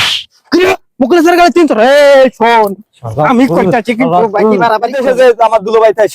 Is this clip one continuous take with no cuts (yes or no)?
no